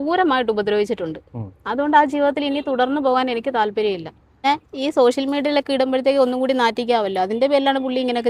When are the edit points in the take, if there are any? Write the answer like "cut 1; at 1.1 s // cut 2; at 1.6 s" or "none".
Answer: cut 1; at 4.4 s

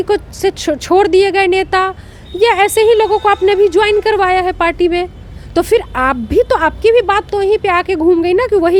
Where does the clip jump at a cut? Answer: none

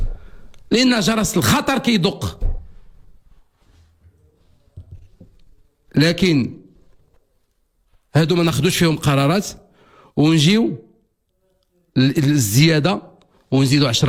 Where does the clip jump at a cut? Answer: none

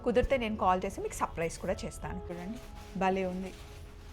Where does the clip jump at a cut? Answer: cut 1; at 2.4 s

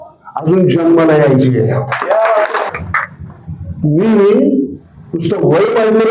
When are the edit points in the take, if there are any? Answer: cut 1; at 2.7 s

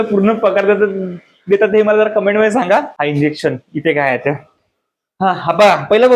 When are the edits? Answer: cut 1; at 2.9 s

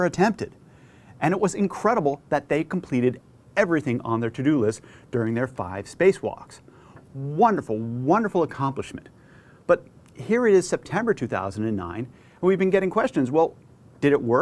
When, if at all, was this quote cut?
cut 1; at 2.2 s

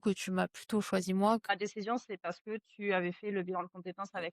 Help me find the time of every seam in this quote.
cut 1; at 1.5 s

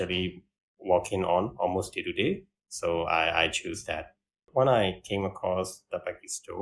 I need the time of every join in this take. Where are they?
cut 1; at 4.5 s

